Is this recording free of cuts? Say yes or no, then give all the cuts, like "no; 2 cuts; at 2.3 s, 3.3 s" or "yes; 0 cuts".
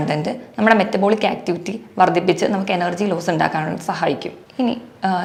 yes; 0 cuts